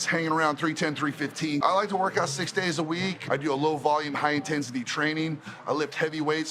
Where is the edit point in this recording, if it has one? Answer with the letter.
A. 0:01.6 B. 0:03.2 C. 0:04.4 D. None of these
A